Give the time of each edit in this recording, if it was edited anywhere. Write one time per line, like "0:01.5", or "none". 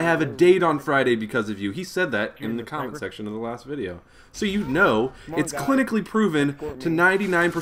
0:02.4